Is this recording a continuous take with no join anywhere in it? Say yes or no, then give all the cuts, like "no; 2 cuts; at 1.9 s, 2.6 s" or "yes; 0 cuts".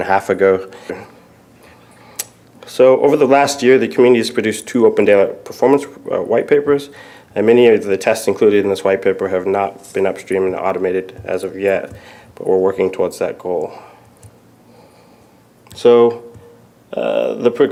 yes; 0 cuts